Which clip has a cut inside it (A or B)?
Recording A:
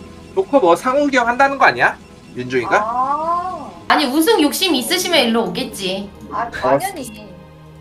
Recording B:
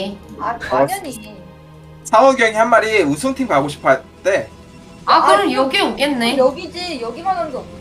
A